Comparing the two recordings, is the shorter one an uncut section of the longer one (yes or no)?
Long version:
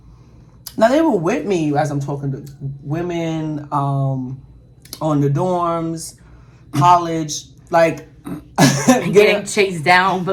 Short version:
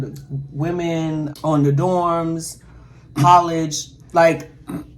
no